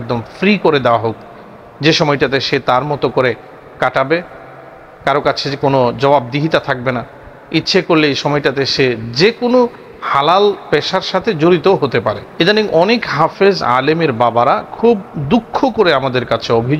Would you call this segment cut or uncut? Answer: cut